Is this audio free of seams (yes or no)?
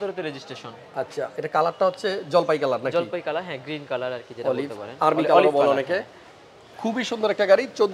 yes